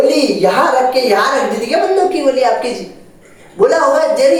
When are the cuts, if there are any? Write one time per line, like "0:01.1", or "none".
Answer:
none